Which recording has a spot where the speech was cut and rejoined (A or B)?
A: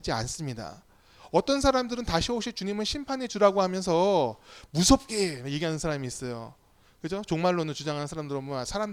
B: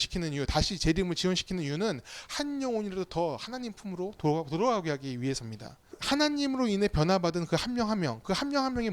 B